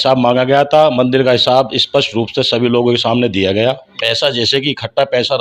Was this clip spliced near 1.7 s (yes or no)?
no